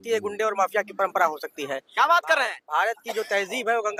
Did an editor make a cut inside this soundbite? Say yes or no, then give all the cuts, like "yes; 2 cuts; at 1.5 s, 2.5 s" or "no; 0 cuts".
no; 0 cuts